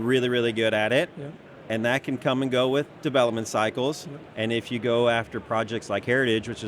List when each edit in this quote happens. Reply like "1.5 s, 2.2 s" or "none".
4.3 s